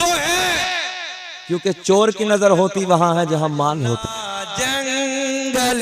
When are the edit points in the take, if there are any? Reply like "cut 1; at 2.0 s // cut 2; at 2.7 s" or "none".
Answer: cut 1; at 4.5 s